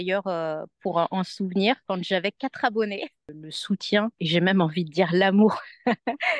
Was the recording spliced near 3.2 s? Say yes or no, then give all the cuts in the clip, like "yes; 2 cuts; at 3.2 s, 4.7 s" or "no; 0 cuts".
yes; 1 cut; at 3.2 s